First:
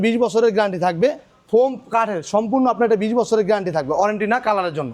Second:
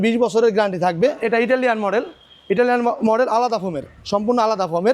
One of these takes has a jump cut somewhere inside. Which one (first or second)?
second